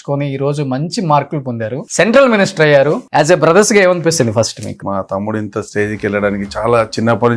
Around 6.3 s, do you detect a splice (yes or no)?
no